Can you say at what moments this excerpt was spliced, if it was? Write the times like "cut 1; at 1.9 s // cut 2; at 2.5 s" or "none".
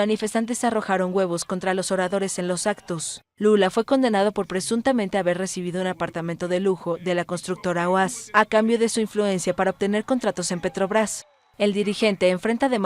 none